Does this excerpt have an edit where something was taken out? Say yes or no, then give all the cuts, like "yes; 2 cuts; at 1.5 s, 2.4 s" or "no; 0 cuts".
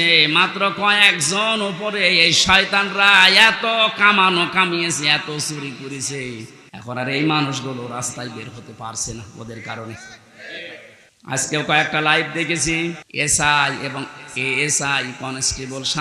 yes; 3 cuts; at 6.6 s, 11.0 s, 13.1 s